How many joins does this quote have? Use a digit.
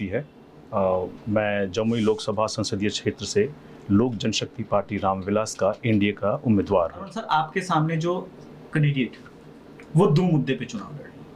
1